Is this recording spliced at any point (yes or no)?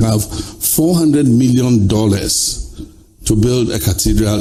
no